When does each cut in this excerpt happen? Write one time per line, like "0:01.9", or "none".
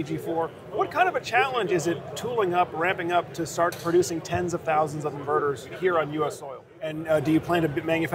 0:07.0